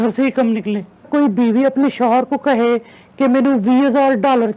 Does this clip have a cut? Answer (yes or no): yes